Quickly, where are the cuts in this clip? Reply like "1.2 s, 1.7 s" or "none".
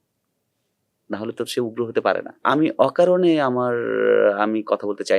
2.4 s